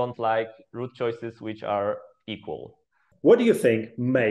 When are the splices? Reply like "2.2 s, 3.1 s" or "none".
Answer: 3.0 s